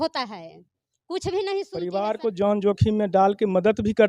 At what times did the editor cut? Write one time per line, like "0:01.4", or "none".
0:01.8